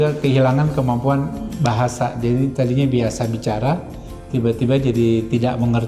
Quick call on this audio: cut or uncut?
uncut